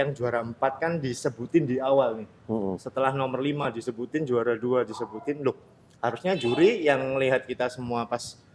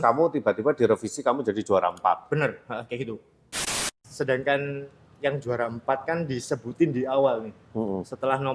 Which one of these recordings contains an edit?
second; 1 cut; at 3.7 s

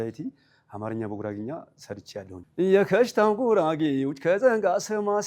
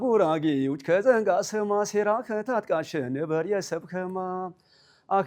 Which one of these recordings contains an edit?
first; 1 cut; at 2.4 s

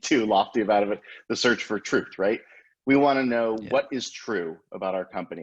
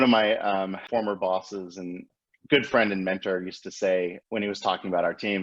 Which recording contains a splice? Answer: second; 3 cuts; at 0.8 s, 2.2 s, 4.2 s

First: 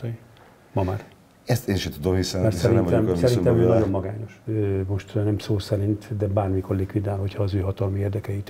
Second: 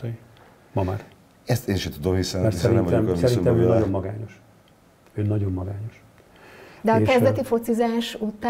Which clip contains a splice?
first; 1 cut; at 4.3 s

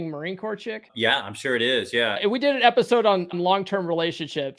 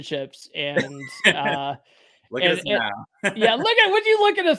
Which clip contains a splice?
first; 3 cuts; at 0.9 s, 2.2 s, 3.3 s

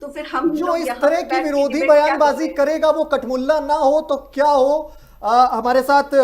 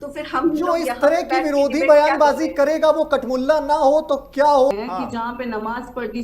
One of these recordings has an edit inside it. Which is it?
second; 1 cut; at 4.7 s

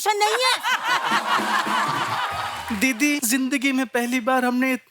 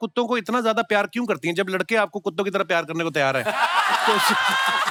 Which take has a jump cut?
first; 2 cuts; at 2.3 s, 3.2 s

